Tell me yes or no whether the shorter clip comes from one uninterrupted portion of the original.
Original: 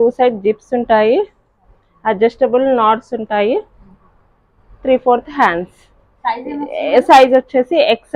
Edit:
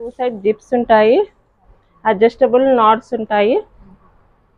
yes